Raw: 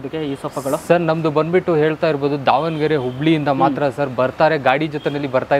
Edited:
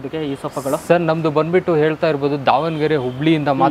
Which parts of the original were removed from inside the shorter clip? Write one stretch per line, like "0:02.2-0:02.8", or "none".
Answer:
none